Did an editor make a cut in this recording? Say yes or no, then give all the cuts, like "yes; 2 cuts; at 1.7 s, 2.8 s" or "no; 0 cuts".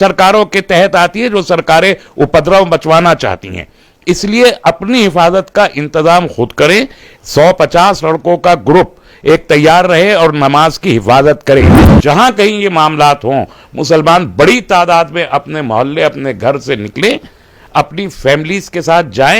yes; 1 cut; at 11.9 s